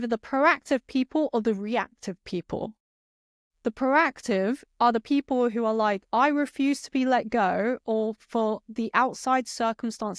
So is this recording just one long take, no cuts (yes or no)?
yes